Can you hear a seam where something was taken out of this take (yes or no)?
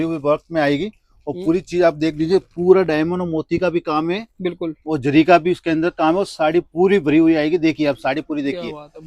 no